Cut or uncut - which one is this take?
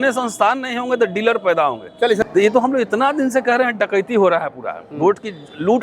cut